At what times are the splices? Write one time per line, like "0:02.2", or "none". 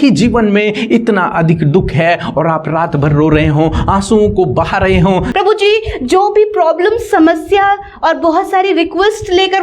0:05.3